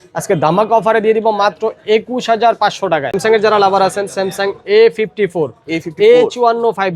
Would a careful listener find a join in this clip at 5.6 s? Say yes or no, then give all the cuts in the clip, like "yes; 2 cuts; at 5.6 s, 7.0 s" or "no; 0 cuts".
no; 1 cut; at 3.1 s